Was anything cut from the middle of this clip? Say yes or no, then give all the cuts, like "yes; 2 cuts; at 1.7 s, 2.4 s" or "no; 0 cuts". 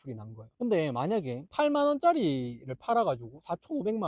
no; 0 cuts